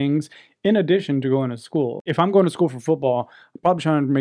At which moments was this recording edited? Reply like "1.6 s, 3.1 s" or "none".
2.1 s